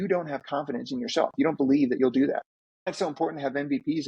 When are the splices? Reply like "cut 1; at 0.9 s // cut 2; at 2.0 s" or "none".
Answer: cut 1; at 2.9 s